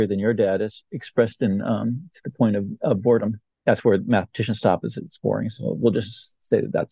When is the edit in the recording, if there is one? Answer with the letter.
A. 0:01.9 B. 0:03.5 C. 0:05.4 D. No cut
B